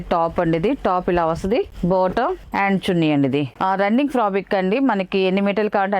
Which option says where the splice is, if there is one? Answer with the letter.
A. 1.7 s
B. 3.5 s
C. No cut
B